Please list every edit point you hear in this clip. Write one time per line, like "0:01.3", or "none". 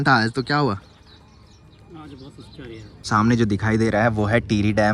0:03.1